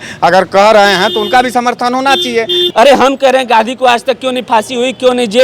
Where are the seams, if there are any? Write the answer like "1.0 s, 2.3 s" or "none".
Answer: 2.6 s